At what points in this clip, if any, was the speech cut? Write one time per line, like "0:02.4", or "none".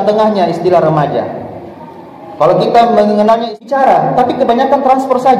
0:03.5